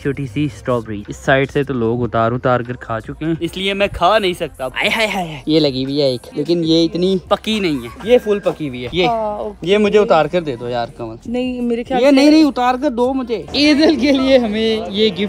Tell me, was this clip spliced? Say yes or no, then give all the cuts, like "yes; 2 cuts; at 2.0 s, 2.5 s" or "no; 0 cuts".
yes; 4 cuts; at 1.1 s, 3.4 s, 4.7 s, 13.5 s